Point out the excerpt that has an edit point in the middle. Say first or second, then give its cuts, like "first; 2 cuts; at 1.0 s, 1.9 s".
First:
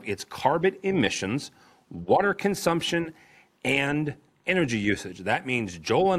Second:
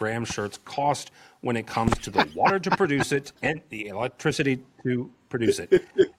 second; 1 cut; at 3.3 s